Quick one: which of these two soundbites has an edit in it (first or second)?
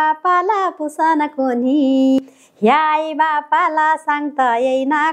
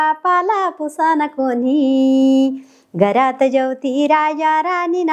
first